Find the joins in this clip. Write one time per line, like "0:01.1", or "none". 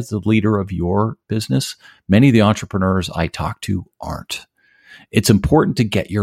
0:01.2